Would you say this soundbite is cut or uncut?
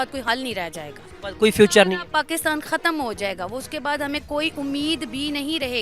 uncut